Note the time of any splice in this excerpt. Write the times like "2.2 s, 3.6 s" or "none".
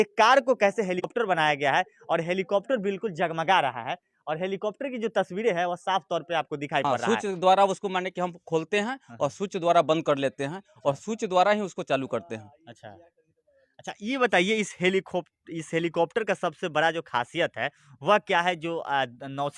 1.1 s, 6.8 s